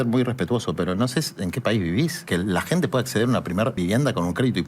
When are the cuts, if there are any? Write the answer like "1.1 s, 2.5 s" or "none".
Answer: 2.2 s, 3.8 s